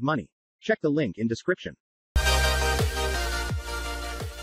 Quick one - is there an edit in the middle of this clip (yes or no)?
yes